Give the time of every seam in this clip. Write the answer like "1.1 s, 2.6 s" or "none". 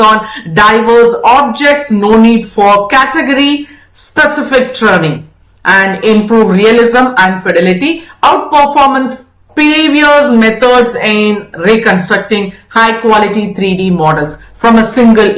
none